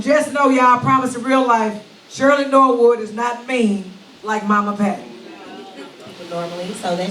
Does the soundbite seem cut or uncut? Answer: cut